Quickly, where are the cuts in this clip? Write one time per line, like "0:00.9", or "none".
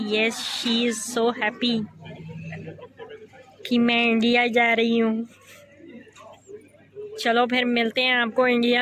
none